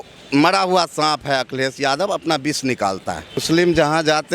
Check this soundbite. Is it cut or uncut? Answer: cut